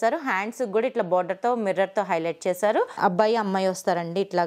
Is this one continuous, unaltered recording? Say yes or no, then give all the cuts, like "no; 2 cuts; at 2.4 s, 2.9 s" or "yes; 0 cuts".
no; 1 cut; at 2.9 s